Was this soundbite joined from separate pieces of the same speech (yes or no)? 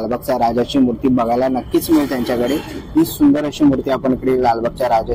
no